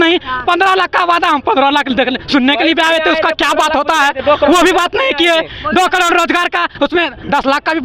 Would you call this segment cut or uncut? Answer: uncut